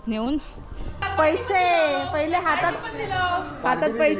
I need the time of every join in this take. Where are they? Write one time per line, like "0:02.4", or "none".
0:01.0